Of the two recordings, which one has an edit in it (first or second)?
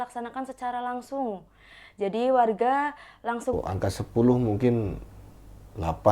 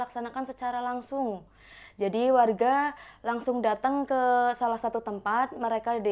first